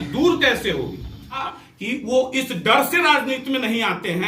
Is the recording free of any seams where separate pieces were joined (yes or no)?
no